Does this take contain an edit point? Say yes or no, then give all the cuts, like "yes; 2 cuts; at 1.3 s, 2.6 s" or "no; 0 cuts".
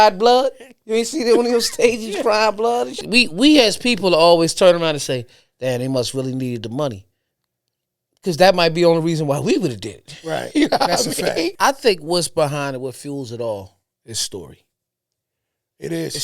yes; 2 cuts; at 3.0 s, 11.5 s